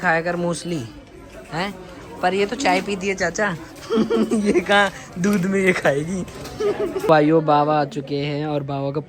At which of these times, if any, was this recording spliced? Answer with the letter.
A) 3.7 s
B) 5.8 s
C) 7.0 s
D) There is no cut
C